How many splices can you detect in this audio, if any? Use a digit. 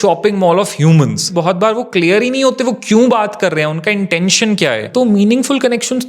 2